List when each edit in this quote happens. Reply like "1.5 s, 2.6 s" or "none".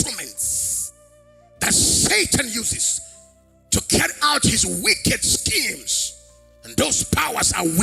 none